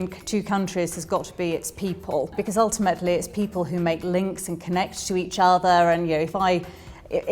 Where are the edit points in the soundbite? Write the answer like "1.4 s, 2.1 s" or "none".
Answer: none